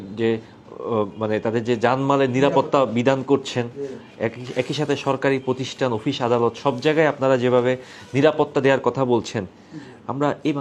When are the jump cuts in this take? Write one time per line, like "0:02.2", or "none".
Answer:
none